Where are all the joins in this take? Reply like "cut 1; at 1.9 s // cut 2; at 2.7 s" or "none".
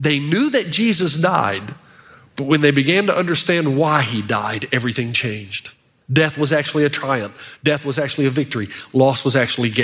none